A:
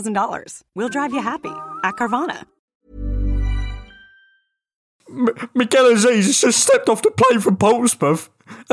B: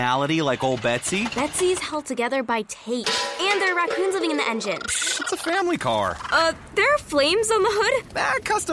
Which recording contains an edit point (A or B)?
A